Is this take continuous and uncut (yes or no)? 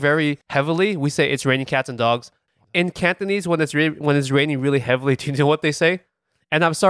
no